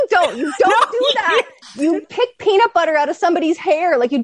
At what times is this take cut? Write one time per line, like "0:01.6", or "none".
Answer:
0:01.6